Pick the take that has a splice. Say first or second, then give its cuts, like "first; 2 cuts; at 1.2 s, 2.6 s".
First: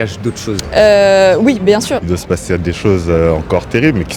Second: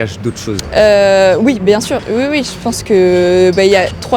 first; 1 cut; at 2.0 s